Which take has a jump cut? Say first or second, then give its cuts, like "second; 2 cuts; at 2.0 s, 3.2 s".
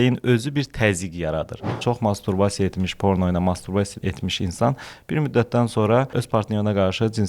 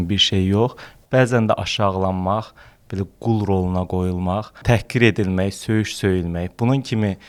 first; 3 cuts; at 1.8 s, 3.9 s, 6.2 s